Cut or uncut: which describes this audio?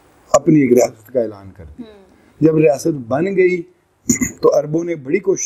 uncut